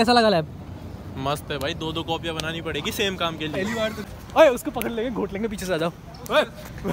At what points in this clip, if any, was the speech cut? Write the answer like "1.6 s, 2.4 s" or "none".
4.0 s

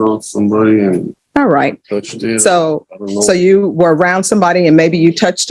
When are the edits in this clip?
1.2 s

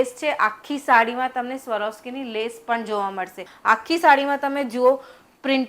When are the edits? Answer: 3.5 s

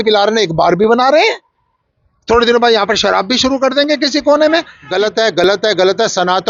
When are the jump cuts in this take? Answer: 4.8 s

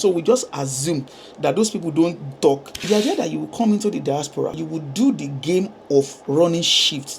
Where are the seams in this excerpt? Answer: 2.7 s, 4.6 s

